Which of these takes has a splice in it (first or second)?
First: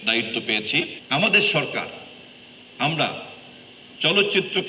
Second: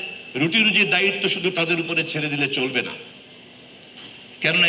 first